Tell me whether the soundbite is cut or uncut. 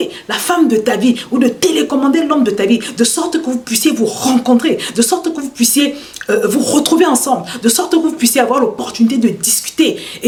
uncut